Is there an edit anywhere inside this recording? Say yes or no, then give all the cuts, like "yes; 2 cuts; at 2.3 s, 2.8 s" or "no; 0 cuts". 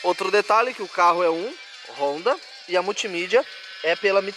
no; 0 cuts